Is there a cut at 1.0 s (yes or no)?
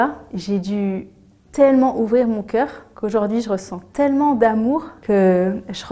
no